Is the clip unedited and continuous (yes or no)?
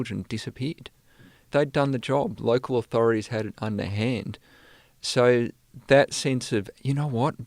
no